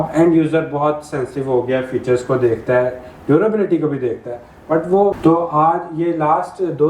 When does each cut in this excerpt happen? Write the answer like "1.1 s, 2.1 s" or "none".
5.1 s